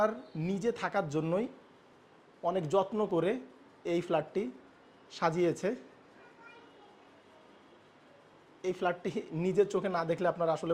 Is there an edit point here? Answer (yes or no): no